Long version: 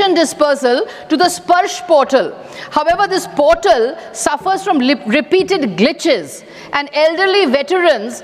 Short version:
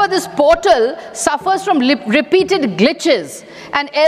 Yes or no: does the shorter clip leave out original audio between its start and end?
no